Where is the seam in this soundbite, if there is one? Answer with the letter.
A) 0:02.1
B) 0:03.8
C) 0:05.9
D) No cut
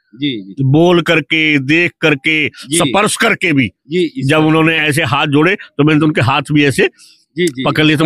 D